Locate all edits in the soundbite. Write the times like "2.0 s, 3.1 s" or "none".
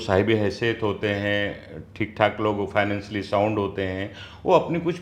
none